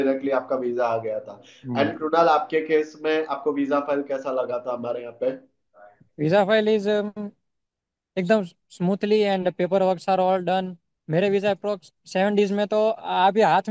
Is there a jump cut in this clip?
no; 0 cuts

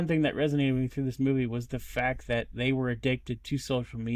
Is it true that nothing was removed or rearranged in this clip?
yes; 0 cuts

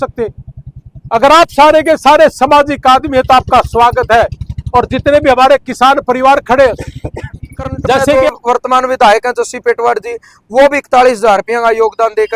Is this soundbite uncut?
no; 1 cut; at 8.1 s

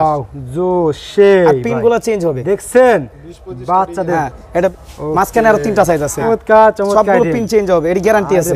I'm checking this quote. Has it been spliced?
yes; 2 cuts; at 4.7 s, 6.3 s

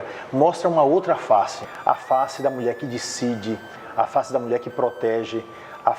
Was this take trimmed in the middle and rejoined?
yes; 1 cut; at 1.7 s

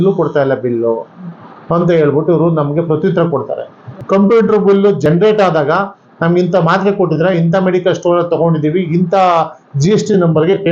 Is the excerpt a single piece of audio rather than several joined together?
no; 2 cuts; at 3.8 s, 5.1 s

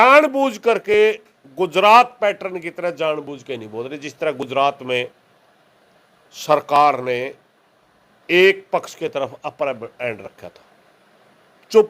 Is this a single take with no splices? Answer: yes; 0 cuts

